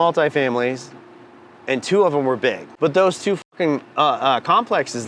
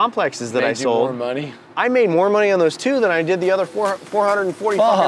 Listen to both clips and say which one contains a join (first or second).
first